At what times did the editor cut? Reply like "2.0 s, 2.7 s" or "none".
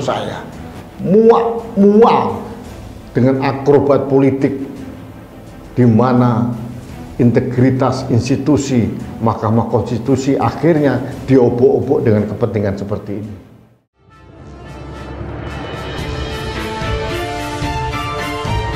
13.9 s